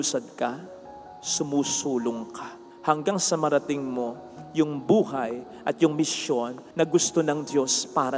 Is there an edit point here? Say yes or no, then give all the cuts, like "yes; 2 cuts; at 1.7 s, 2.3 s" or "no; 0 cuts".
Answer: yes; 1 cut; at 6.6 s